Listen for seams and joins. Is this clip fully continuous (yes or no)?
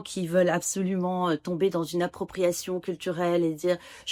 yes